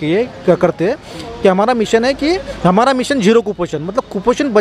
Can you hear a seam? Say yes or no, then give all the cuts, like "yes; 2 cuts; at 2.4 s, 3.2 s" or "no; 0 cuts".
no; 0 cuts